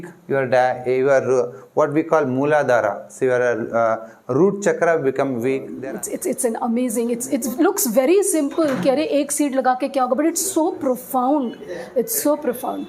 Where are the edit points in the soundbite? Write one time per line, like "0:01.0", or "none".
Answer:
0:05.7